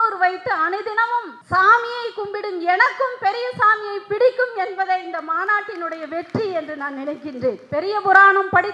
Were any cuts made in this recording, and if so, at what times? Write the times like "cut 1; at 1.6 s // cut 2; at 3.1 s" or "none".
cut 1; at 1.4 s // cut 2; at 7.6 s

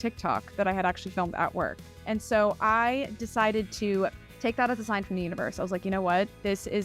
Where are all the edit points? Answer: cut 1; at 2.0 s // cut 2; at 4.3 s

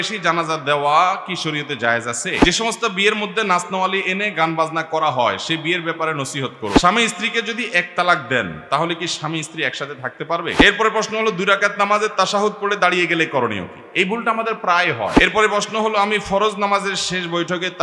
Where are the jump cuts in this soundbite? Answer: cut 1; at 2.4 s // cut 2; at 6.8 s // cut 3; at 10.6 s // cut 4; at 15.1 s

